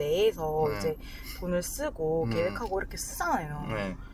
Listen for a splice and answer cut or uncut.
uncut